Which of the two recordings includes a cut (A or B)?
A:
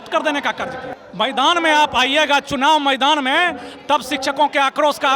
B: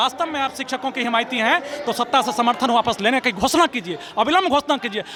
A